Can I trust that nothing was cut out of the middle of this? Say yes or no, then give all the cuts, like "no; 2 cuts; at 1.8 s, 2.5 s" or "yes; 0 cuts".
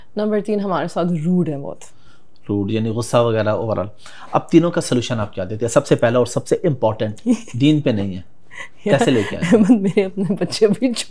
yes; 0 cuts